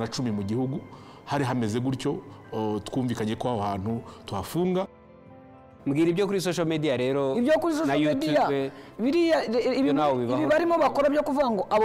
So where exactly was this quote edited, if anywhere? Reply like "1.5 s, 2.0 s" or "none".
5.2 s